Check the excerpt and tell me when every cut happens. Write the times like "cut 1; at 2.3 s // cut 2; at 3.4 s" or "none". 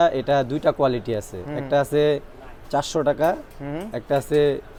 none